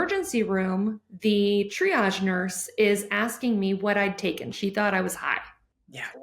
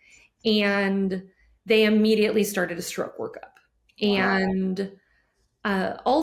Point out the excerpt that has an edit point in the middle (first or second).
first